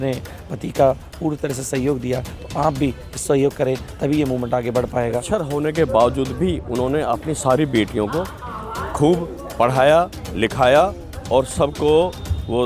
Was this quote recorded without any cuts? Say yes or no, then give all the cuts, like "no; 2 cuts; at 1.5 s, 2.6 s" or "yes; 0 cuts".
no; 1 cut; at 5.2 s